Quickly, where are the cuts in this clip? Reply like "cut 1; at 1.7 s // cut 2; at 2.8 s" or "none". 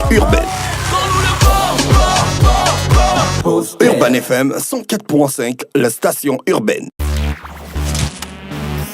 cut 1; at 7.0 s